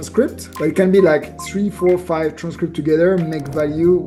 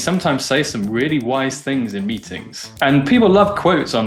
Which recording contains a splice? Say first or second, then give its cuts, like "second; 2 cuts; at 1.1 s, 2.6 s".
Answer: second; 1 cut; at 2.8 s